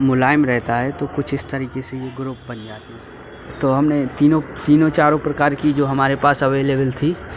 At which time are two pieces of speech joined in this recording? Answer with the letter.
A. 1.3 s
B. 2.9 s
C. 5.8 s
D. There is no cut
B